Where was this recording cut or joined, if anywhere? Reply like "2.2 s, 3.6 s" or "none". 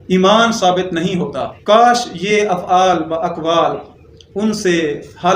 1.5 s